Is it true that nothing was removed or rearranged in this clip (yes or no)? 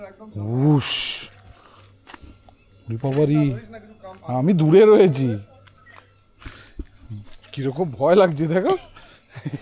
yes